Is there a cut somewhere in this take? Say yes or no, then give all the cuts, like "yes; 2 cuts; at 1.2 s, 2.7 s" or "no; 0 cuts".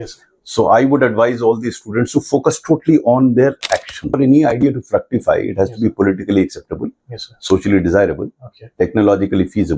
yes; 1 cut; at 4.1 s